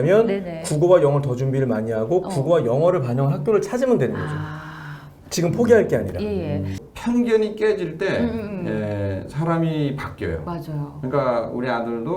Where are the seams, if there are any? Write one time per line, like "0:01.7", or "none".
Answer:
0:06.8